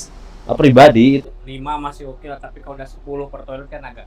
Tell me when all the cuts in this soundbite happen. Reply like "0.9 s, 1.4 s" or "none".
1.2 s